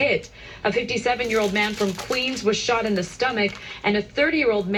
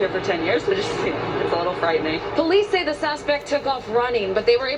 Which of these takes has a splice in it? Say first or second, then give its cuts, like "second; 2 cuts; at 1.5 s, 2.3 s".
second; 1 cut; at 3.4 s